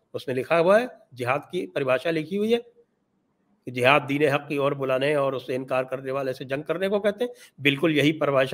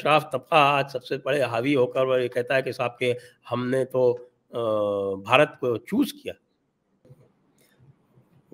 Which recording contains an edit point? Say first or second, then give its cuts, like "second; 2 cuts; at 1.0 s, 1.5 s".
second; 1 cut; at 7.0 s